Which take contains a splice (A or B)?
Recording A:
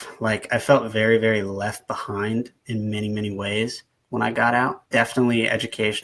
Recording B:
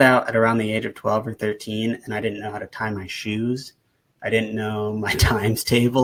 A